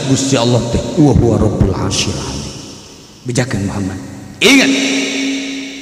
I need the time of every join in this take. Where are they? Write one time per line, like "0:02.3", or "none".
0:04.2